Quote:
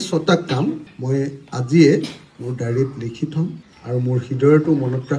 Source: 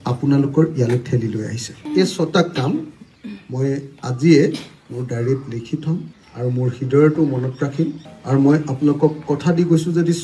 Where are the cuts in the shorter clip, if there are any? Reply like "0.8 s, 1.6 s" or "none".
0.9 s